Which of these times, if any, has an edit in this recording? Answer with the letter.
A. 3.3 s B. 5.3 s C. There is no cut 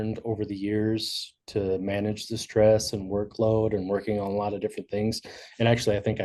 C